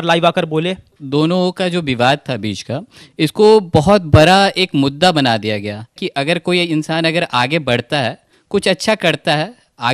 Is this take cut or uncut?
cut